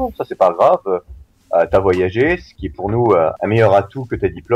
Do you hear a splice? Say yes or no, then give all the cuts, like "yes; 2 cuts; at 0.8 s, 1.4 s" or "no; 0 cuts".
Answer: yes; 2 cuts; at 2.6 s, 3.3 s